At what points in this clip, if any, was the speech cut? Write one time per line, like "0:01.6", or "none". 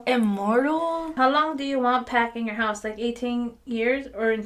0:01.1